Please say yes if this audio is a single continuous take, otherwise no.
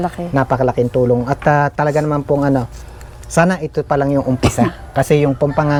yes